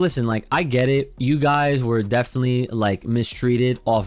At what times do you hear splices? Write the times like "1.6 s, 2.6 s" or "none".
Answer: 1.1 s